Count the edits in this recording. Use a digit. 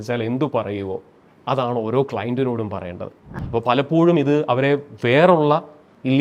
1